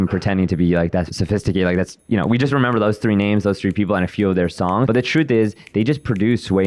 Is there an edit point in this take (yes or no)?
yes